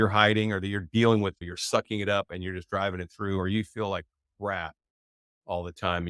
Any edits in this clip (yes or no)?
yes